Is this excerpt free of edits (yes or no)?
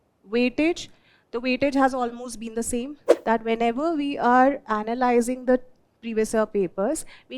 no